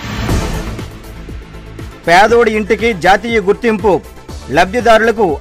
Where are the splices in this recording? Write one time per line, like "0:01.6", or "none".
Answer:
0:01.8